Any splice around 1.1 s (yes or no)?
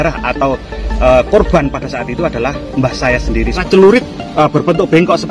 no